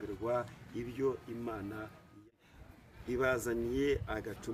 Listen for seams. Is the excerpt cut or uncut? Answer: cut